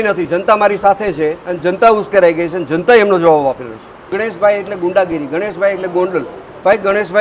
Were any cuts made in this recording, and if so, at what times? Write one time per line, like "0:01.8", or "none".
0:04.0